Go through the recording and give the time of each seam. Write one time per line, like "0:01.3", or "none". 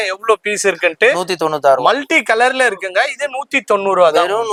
none